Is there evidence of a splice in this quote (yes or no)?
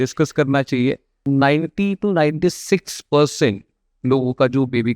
yes